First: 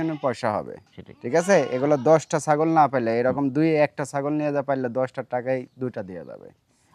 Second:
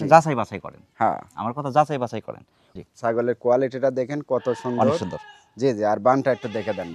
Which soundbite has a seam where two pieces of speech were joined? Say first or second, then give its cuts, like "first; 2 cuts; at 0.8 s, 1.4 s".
second; 1 cut; at 2.6 s